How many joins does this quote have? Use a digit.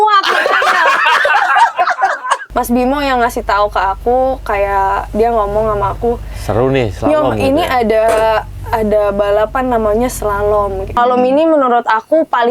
2